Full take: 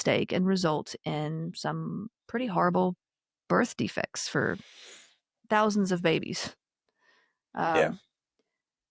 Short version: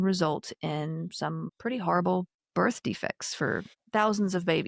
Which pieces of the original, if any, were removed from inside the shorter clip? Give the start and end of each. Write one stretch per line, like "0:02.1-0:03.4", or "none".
0:01.9-0:02.2
0:03.1-0:03.3
0:04.7-0:05.3